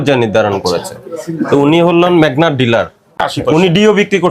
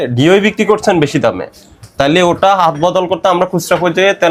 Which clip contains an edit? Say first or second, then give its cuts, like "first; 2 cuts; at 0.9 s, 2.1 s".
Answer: first; 1 cut; at 3.2 s